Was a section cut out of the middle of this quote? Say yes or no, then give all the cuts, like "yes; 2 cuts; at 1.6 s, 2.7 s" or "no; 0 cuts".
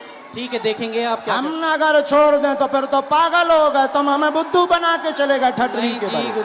no; 0 cuts